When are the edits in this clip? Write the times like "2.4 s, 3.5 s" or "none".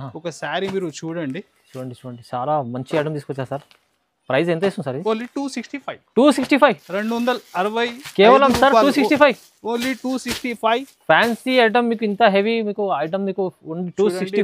none